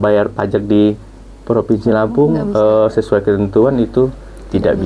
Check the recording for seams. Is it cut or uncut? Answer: uncut